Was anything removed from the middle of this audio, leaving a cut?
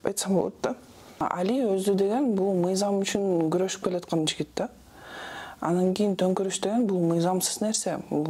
yes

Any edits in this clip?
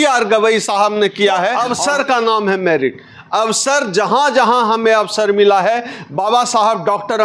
yes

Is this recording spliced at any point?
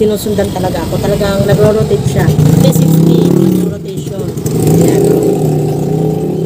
no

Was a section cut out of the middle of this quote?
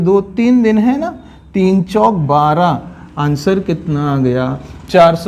no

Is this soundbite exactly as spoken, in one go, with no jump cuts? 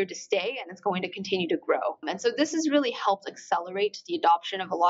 no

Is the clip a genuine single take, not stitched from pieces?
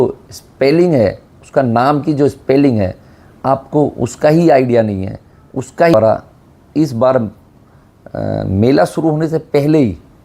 no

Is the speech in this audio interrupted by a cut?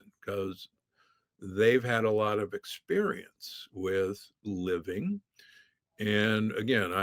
no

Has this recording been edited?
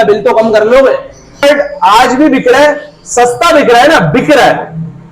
yes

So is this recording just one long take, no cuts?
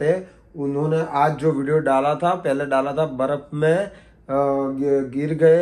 yes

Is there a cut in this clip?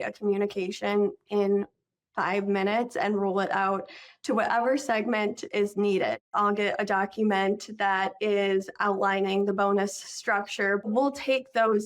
yes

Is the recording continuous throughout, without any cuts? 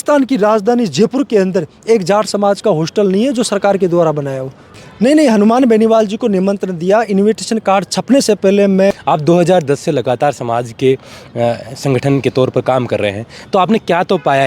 no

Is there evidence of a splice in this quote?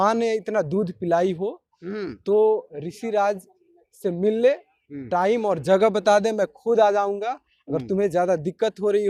no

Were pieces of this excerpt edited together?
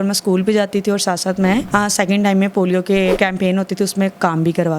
yes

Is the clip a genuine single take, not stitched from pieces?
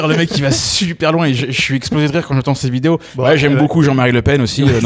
no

